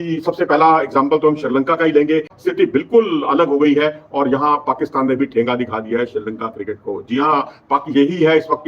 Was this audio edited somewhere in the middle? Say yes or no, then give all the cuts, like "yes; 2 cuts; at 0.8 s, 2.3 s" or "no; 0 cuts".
yes; 1 cut; at 2.3 s